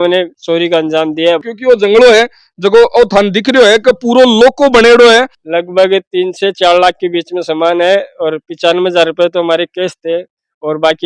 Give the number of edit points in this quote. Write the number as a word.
two